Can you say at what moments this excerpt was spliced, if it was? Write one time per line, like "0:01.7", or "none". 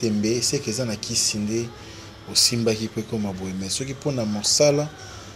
none